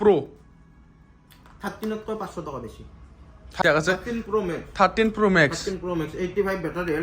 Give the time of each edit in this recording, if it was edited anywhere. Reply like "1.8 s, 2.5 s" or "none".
3.6 s